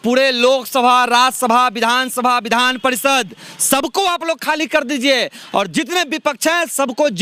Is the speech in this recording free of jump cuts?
yes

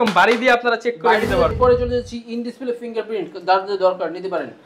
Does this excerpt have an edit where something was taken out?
yes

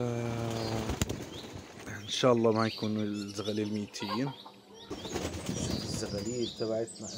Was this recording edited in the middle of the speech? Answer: yes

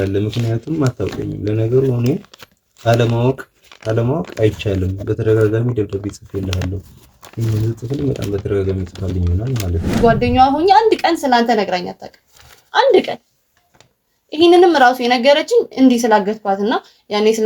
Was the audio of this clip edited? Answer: yes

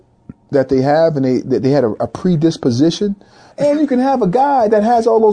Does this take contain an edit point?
yes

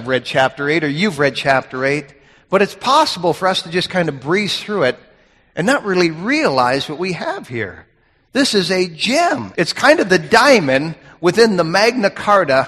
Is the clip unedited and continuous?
yes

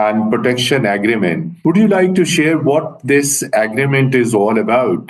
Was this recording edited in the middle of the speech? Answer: yes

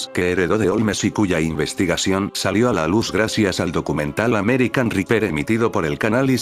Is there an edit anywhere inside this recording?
yes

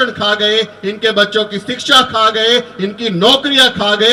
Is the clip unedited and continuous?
yes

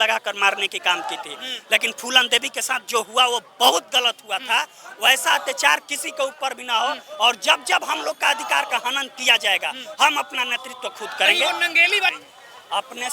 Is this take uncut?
no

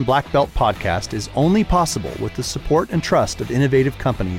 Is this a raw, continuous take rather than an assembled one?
yes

